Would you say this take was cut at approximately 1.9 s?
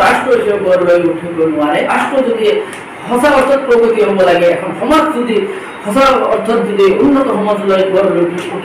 yes; 1 cut; at 1.9 s

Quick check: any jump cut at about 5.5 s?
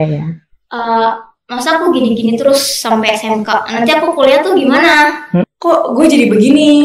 yes; 1 cut; at 5.5 s

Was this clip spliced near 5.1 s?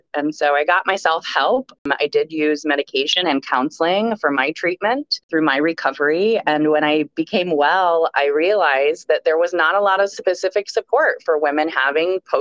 yes; 2 cuts; at 1.8 s, 5.1 s

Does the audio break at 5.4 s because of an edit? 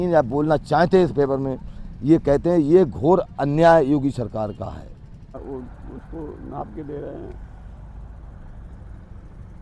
yes; 1 cut; at 5.4 s

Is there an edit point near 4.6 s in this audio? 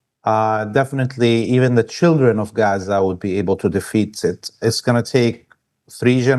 yes; 1 cut; at 4.6 s

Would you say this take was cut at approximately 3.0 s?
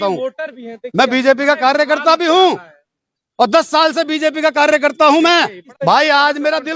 no; 1 cut; at 5.6 s

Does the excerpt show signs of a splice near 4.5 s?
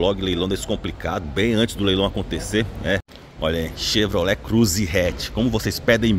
no; 1 cut; at 3.2 s

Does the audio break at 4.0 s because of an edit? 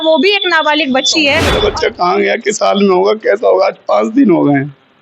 no; 1 cut; at 1.5 s

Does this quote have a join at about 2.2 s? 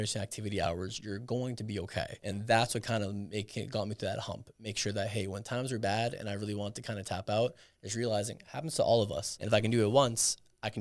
yes; 2 cuts; at 2.2 s, 9.3 s

